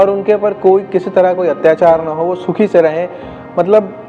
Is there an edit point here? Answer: no; 0 cuts

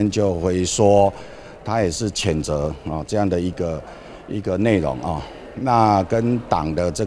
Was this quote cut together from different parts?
no; 0 cuts

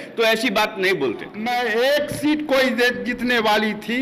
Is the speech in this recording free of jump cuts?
no; 1 cut; at 1.3 s

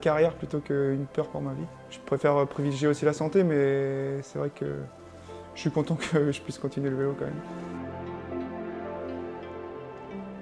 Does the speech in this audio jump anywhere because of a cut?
no; 0 cuts

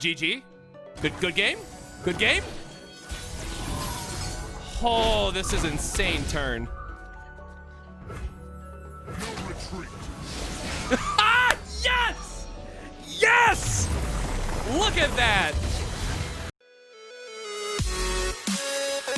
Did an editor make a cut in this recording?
yes; 1 cut; at 16.5 s

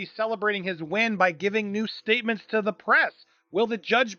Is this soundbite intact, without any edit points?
yes; 0 cuts

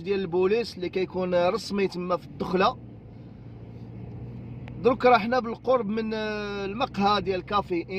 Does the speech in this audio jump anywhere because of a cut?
no; 0 cuts

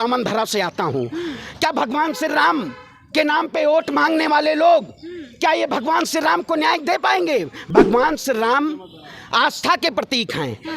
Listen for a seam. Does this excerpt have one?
yes; 1 cut; at 7.6 s

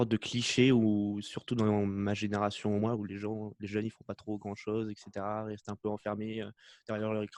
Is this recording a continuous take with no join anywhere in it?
yes; 0 cuts

